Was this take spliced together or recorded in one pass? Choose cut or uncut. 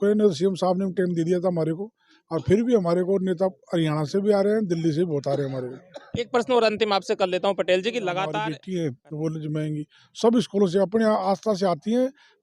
cut